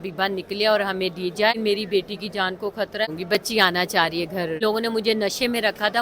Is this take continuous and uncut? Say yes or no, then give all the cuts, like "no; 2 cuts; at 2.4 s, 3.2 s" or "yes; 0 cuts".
no; 3 cuts; at 1.6 s, 3.1 s, 4.6 s